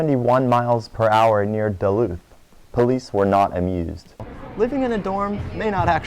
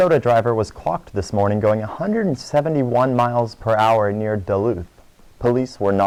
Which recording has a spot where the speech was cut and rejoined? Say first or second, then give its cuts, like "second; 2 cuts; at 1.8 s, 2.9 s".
first; 1 cut; at 4.3 s